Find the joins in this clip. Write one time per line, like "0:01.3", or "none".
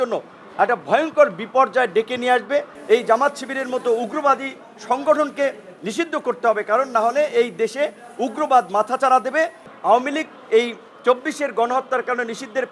0:02.7
0:09.6